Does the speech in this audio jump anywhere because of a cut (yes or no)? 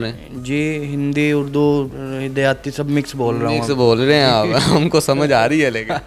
no